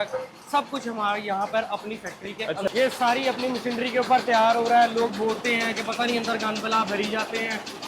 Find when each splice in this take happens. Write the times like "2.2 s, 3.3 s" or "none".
2.7 s

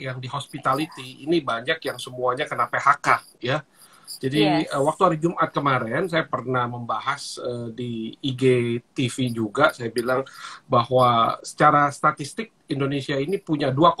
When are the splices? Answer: none

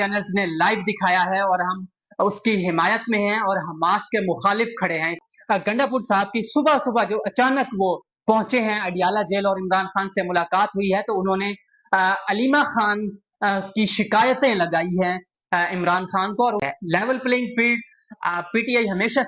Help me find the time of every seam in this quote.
5.2 s, 16.6 s

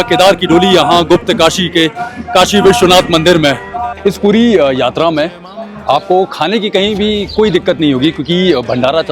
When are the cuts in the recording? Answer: 3.9 s

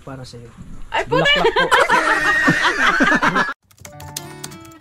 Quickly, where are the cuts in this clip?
3.5 s

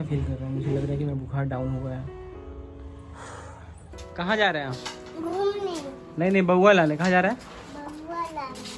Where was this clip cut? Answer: none

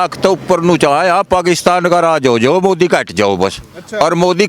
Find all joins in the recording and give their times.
none

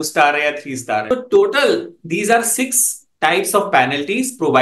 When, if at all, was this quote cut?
1.0 s

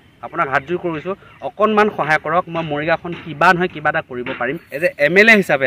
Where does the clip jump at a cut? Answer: 4.6 s

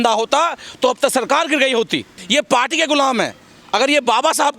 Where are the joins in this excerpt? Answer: 2.2 s

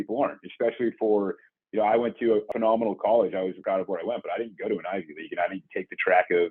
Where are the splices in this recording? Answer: 2.5 s, 3.6 s

